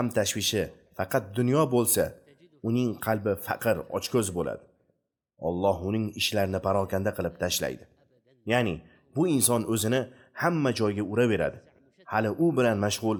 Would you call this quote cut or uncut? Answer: uncut